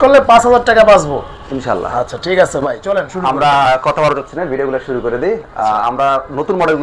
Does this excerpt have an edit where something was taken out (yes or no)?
no